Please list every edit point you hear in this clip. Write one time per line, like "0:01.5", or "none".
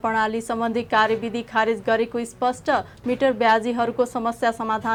none